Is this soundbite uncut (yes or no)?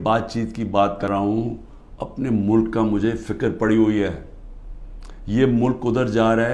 no